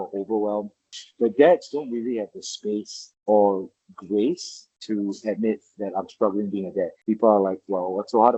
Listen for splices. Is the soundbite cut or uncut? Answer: uncut